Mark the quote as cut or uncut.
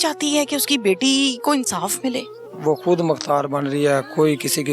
cut